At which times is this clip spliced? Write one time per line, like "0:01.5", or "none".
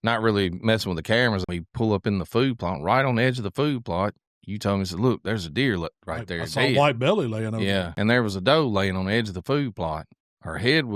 0:01.4
0:07.9